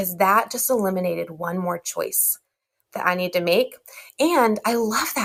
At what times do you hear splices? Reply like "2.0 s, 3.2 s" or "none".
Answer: none